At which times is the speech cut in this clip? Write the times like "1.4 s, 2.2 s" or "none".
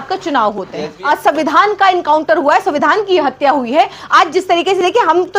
0.9 s